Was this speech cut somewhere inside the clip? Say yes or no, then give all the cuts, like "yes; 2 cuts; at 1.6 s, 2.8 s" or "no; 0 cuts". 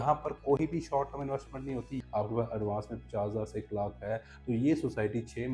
yes; 1 cut; at 2.0 s